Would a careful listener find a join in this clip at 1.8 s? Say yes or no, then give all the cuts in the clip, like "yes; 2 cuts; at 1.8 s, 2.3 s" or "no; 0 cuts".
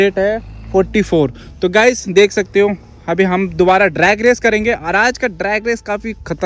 no; 0 cuts